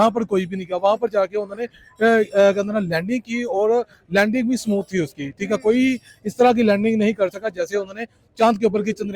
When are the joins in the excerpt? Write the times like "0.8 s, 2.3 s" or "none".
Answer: none